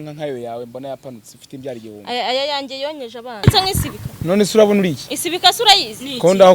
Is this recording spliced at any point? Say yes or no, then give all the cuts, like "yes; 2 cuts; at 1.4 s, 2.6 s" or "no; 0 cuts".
yes; 1 cut; at 3.4 s